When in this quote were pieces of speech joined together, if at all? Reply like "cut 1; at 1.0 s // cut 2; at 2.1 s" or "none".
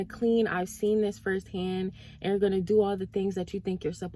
none